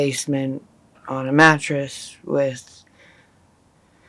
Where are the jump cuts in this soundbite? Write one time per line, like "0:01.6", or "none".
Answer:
none